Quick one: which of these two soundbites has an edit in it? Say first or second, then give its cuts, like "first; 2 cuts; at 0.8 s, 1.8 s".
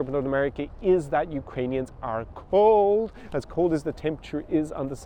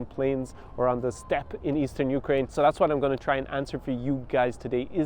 second; 1 cut; at 2.5 s